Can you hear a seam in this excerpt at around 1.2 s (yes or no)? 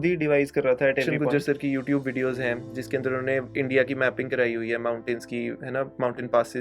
yes